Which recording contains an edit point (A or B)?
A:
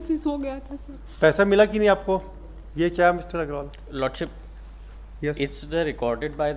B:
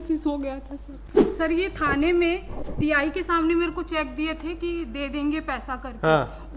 B